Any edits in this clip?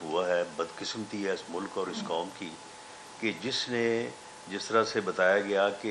no; 0 cuts

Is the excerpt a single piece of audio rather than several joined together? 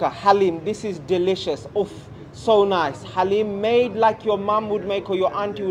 yes; 0 cuts

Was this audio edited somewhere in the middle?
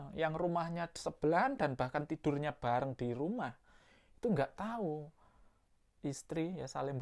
no; 0 cuts

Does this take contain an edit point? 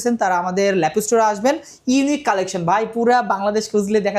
no; 0 cuts

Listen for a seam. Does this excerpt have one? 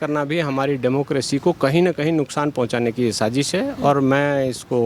no; 0 cuts

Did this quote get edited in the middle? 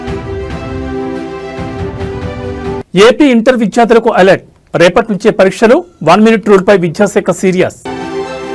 no; 0 cuts

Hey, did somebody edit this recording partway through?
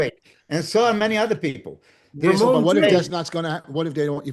no; 0 cuts

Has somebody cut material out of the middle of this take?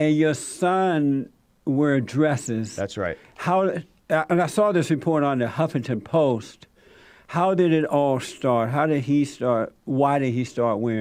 no; 0 cuts

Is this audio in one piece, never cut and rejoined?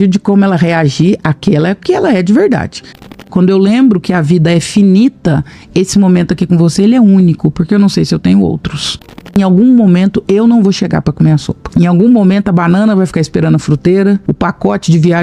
no; 4 cuts; at 3.3 s, 9.4 s, 11.6 s, 14.3 s

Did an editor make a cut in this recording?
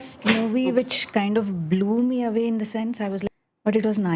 yes; 1 cut; at 3.2 s

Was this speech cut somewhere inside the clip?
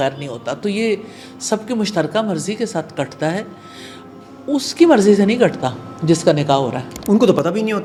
no; 0 cuts

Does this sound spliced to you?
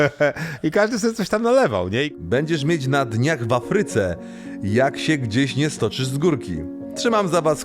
yes; 1 cut; at 2.1 s

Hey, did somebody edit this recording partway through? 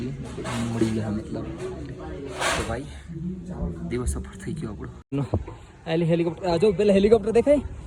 yes; 1 cut; at 5.1 s

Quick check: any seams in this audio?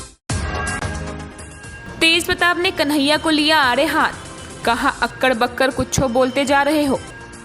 no; 0 cuts

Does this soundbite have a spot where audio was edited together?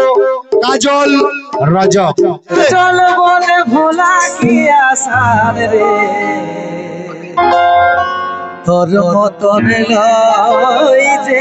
yes; 1 cut; at 2.6 s

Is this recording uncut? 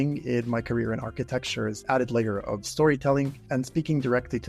no; 2 cuts; at 1.8 s, 3.4 s

